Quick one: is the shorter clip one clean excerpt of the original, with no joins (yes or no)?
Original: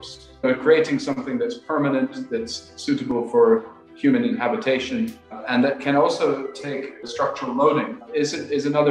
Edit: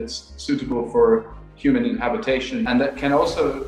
no